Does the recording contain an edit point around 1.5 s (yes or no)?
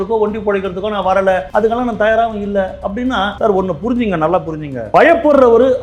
yes